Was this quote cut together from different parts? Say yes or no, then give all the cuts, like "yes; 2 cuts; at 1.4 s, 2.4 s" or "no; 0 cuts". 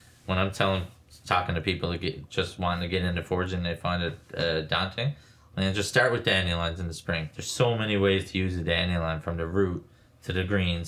yes; 1 cut; at 7.4 s